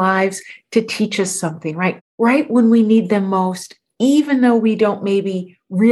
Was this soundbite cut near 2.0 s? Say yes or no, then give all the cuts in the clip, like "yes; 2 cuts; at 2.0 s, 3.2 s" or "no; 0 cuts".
yes; 1 cut; at 2.0 s